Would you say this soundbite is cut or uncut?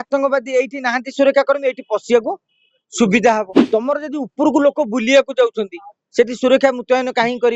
cut